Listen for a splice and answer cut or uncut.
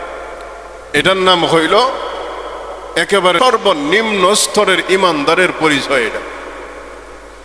cut